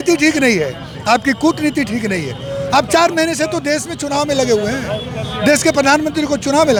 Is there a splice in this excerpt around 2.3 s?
no; 0 cuts

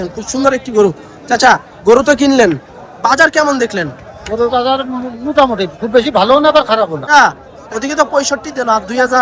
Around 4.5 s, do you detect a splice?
no; 1 cut; at 7.1 s

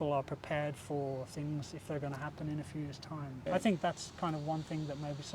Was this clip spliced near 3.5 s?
yes; 1 cut; at 3.5 s

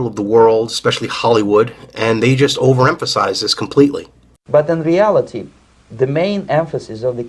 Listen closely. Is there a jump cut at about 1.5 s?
no; 0 cuts

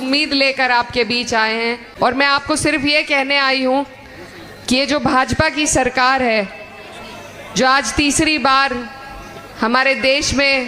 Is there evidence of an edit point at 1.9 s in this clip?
yes; 1 cut; at 1.9 s

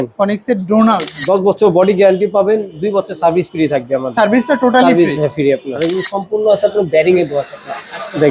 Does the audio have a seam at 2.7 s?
no; 2 cuts; at 1.1 s, 5.8 s

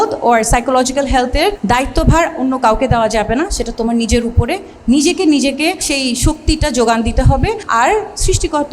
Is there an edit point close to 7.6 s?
yes; 3 cuts; at 1.6 s, 5.8 s, 7.6 s

